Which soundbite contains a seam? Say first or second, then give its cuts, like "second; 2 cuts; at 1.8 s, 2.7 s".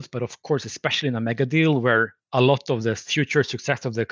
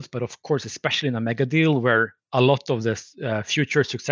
first; 1 cut; at 3.1 s